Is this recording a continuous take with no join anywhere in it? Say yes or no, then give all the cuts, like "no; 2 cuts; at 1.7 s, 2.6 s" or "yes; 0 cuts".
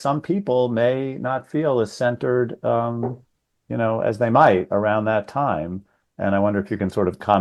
yes; 0 cuts